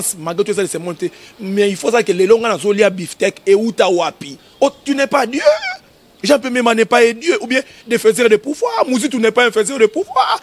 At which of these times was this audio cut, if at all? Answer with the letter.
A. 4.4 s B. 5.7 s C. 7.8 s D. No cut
A